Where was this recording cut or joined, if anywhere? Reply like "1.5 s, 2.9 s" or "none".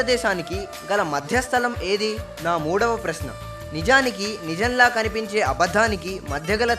2.3 s